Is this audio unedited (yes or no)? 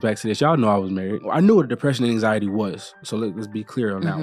no